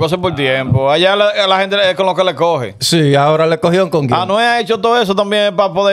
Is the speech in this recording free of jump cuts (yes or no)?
yes